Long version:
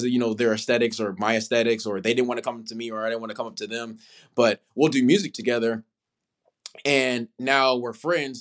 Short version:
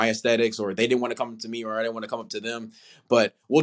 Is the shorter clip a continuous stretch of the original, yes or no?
yes